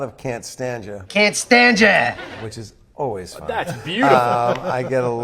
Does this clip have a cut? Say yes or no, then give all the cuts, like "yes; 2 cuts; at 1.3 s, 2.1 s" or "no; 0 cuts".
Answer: yes; 1 cut; at 0.9 s